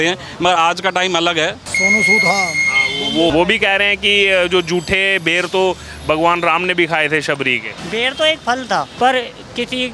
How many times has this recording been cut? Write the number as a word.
four